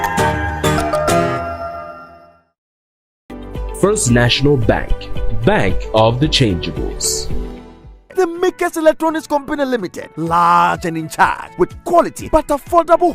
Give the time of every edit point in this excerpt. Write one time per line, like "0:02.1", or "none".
0:08.0